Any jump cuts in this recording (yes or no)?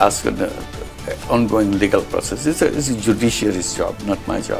no